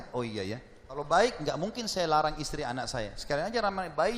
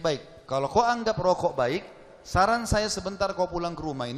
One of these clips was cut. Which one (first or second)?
first